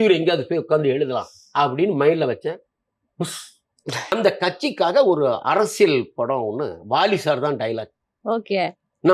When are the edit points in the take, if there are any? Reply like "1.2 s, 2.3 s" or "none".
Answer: 4.1 s